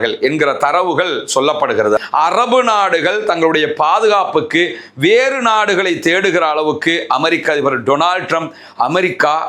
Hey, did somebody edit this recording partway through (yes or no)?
yes